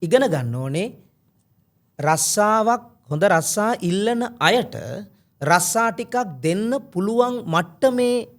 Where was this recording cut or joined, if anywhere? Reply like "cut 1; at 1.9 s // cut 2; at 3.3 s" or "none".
none